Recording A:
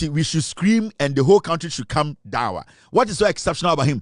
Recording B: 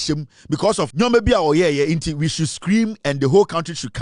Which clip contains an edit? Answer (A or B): B